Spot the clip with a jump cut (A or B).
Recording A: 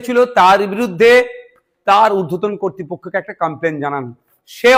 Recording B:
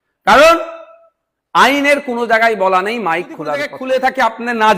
B